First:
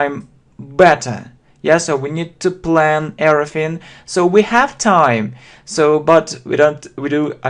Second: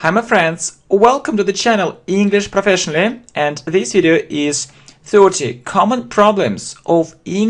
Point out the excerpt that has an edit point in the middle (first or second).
first